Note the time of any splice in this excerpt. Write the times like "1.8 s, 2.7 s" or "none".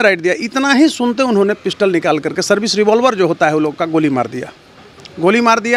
none